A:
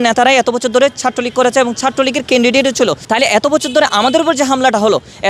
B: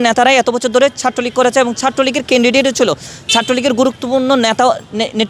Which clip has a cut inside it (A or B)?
A